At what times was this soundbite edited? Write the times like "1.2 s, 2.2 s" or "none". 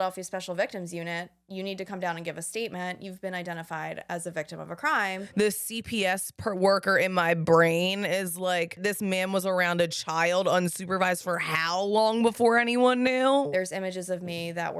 5.3 s, 8.8 s, 13.5 s